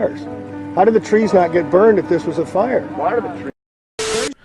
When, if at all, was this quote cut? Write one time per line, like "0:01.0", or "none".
0:03.5